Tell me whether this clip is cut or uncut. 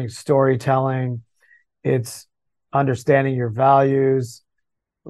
uncut